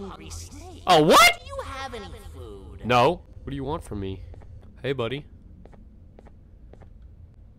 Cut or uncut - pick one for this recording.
cut